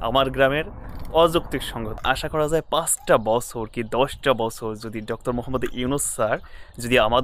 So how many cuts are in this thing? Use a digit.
1